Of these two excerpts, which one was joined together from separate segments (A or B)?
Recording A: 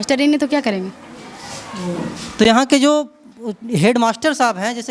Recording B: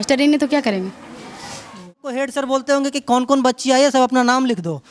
B